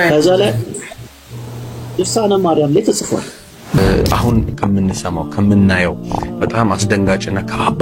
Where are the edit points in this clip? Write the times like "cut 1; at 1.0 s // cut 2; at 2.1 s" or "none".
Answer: cut 1; at 3.8 s